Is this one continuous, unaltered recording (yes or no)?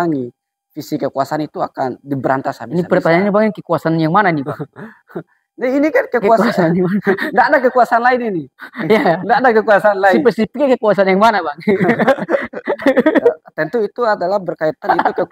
yes